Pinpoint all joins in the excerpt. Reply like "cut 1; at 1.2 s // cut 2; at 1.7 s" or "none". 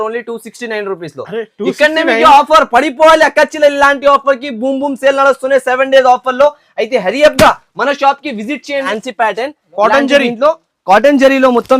cut 1; at 8.9 s